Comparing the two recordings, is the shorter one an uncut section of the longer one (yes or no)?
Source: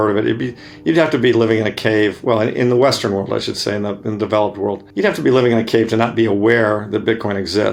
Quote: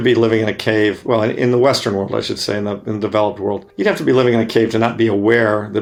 yes